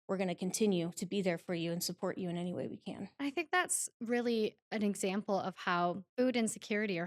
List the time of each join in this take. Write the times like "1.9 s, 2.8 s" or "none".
6.0 s